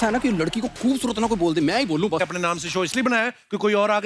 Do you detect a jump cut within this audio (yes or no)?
yes